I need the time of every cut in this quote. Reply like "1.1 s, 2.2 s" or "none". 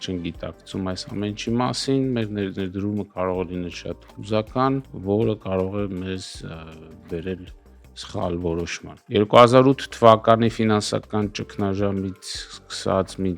none

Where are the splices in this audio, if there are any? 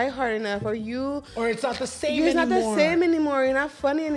none

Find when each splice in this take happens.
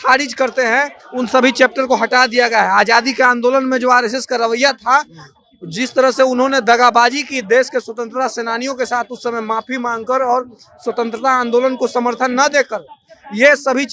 none

